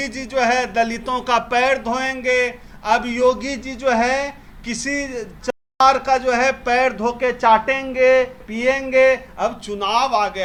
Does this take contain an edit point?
no; 0 cuts

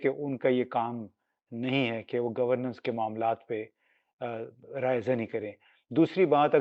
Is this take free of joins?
yes; 0 cuts

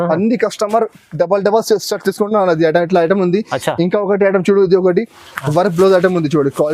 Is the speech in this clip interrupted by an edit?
no; 0 cuts

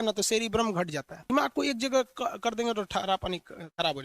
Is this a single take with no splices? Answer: no; 1 cut; at 1.2 s

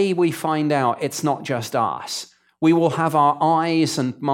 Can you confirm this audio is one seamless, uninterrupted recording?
yes; 0 cuts

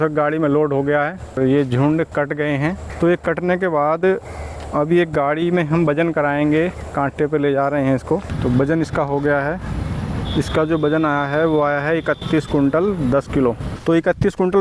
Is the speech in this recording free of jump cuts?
no; 4 cuts; at 1.4 s, 2.9 s, 8.3 s, 13.7 s

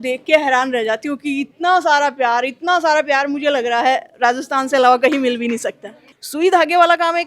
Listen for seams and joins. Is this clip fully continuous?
no; 1 cut; at 6.1 s

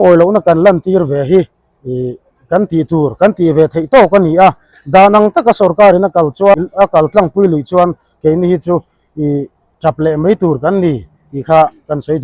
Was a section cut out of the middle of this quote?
yes; 1 cut; at 6.6 s

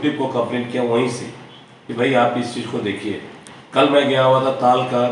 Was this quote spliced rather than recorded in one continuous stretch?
no; 0 cuts

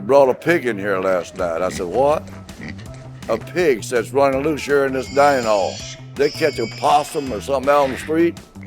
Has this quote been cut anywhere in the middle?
yes; 1 cut; at 6.0 s

